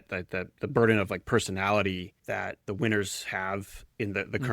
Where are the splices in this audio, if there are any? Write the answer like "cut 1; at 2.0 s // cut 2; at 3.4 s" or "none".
cut 1; at 2.6 s